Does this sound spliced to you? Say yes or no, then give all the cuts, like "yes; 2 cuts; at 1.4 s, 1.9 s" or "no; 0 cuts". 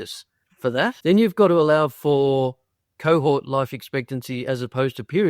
yes; 1 cut; at 1.0 s